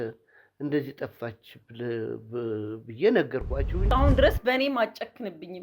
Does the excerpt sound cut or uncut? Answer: cut